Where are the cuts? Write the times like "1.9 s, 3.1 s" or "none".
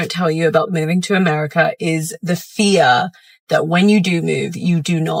none